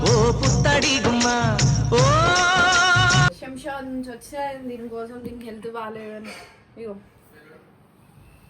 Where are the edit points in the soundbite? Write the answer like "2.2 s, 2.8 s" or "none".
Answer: 3.3 s